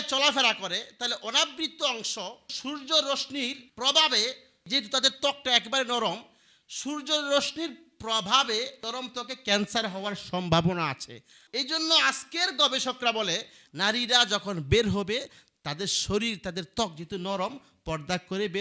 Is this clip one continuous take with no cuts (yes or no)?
yes